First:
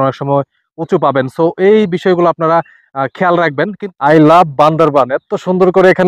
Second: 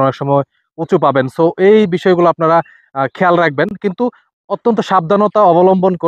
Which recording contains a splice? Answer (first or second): first